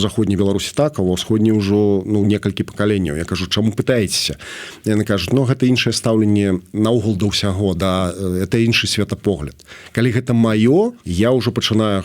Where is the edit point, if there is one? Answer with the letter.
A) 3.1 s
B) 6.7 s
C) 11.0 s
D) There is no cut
C